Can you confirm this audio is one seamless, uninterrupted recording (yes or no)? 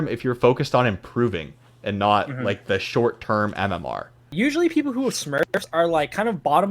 no